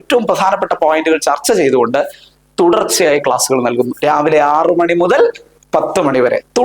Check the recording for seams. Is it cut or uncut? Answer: uncut